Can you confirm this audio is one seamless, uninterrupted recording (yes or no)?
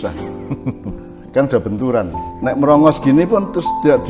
no